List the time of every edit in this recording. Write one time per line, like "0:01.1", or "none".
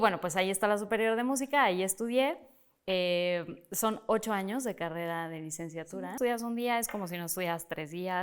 0:05.9